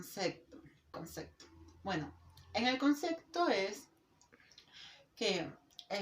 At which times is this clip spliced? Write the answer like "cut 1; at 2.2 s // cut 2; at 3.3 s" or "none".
cut 1; at 0.9 s